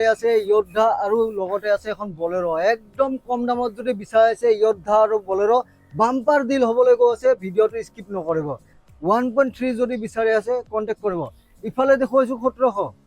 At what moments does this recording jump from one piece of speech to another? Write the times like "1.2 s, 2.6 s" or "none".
8.7 s